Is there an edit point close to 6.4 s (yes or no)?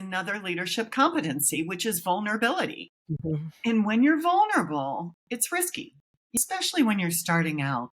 yes